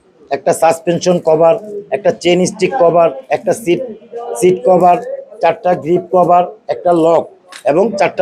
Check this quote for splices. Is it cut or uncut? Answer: uncut